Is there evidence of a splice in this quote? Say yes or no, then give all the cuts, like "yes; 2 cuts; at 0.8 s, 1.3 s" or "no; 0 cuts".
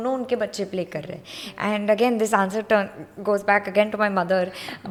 no; 0 cuts